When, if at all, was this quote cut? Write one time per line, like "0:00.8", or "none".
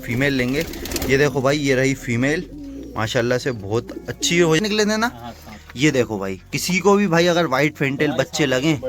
0:04.6